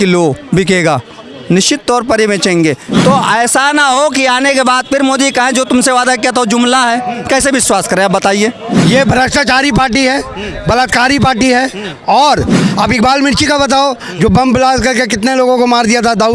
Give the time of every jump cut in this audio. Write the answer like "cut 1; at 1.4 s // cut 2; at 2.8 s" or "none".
cut 1; at 2.9 s // cut 2; at 8.7 s // cut 3; at 12.6 s